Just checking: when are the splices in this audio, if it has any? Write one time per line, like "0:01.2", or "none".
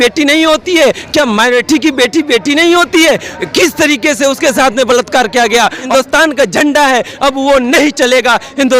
0:05.9